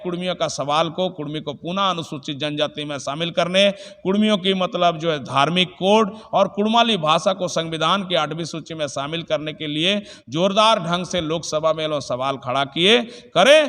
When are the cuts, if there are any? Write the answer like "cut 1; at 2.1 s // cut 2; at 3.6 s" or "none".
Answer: none